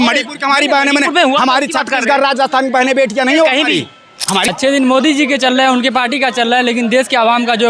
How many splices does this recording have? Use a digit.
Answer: 1